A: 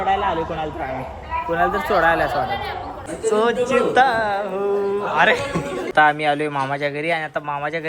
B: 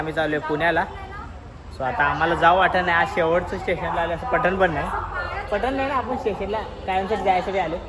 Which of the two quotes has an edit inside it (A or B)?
A